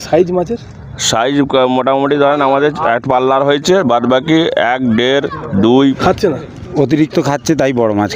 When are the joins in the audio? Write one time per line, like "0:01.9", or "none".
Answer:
0:06.0